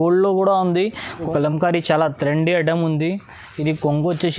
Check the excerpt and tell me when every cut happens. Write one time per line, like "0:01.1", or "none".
0:01.2